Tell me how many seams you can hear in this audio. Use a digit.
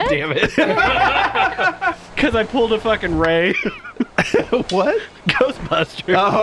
0